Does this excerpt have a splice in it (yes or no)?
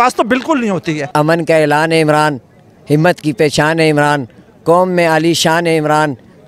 yes